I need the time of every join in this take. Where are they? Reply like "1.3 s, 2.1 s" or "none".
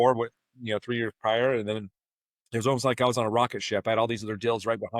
none